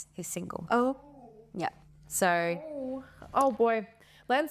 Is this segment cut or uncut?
uncut